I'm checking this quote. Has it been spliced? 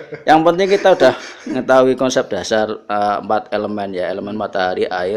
no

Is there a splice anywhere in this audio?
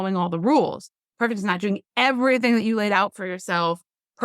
no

